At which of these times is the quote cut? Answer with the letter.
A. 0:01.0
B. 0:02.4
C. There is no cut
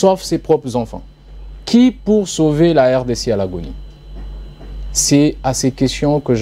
C